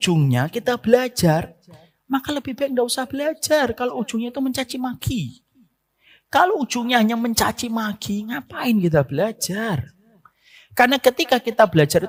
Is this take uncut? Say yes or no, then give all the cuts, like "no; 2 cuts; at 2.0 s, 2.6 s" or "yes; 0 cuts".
yes; 0 cuts